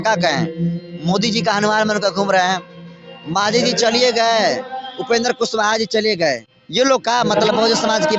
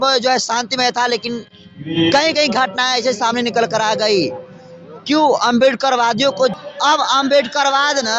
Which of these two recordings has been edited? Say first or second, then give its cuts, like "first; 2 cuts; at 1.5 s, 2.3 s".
second; 1 cut; at 6.6 s